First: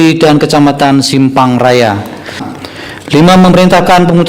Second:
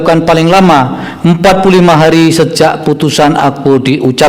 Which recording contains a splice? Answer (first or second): first